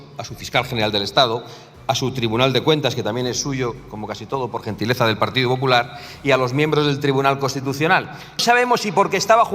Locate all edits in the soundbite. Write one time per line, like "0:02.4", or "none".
0:08.4